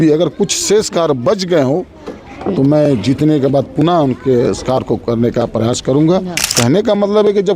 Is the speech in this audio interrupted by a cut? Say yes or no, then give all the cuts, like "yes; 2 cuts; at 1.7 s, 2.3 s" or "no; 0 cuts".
yes; 1 cut; at 6.4 s